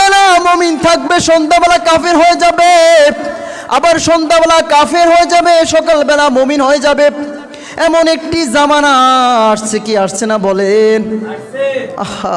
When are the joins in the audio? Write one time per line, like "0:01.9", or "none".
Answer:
none